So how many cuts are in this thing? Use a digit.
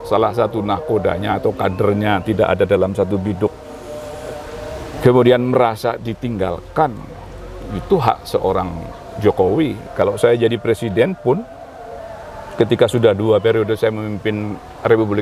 0